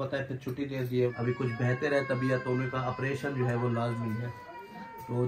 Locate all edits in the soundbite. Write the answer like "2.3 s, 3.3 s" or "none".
1.1 s